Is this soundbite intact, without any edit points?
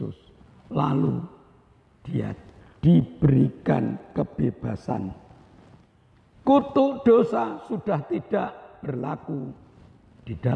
yes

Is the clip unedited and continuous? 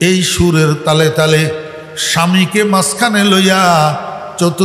yes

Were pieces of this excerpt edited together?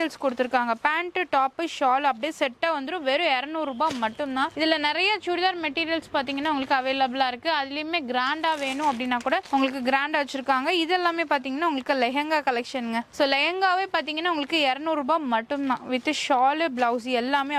no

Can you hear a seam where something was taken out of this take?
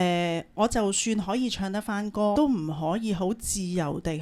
yes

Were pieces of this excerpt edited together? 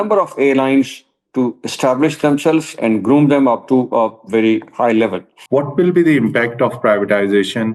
yes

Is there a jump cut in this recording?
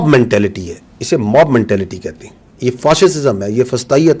no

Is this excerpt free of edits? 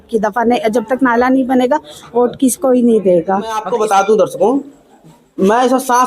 no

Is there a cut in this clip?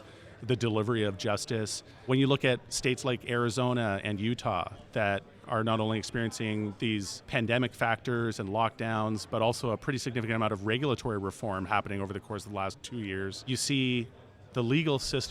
yes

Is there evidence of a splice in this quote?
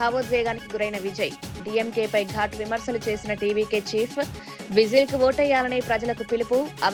no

